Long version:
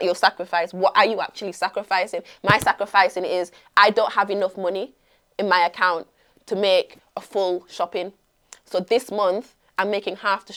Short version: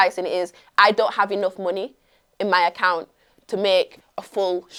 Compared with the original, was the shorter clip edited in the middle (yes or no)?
no